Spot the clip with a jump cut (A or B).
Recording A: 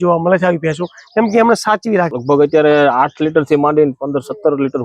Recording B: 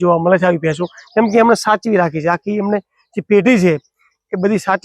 A